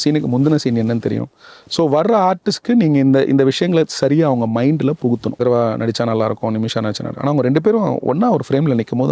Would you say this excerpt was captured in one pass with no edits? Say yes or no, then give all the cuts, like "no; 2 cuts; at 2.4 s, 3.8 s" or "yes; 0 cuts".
no; 1 cut; at 5.4 s